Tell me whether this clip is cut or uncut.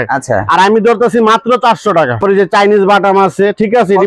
cut